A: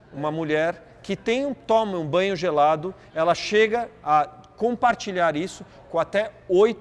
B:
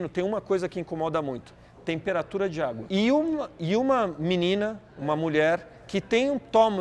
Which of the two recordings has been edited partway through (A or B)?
B